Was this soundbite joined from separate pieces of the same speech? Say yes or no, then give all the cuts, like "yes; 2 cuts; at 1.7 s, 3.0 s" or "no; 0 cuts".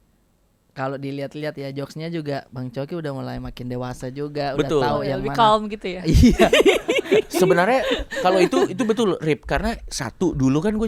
no; 0 cuts